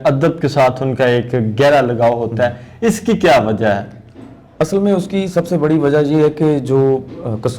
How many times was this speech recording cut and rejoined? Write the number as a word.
zero